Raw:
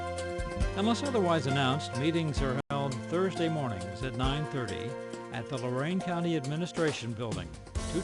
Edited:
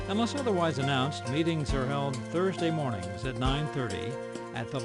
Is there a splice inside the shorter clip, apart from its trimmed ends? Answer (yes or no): yes